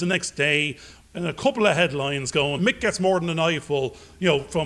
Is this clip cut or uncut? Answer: cut